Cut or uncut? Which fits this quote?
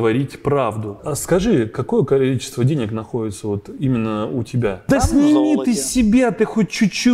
cut